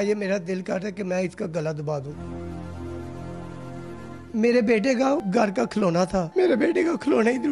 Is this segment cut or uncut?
cut